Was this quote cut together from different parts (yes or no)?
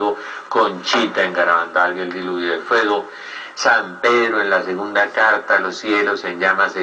no